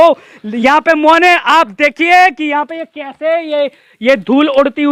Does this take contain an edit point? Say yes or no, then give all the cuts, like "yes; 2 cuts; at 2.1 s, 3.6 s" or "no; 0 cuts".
no; 0 cuts